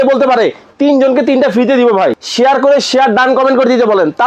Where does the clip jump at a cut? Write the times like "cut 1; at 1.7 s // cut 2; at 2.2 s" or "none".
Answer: cut 1; at 2.2 s